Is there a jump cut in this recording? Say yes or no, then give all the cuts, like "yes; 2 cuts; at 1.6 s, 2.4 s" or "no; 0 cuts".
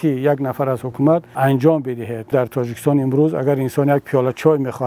yes; 2 cuts; at 1.3 s, 2.3 s